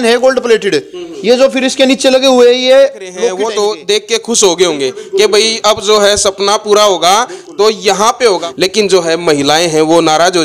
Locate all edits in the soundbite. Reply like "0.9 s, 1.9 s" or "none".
3.3 s, 8.5 s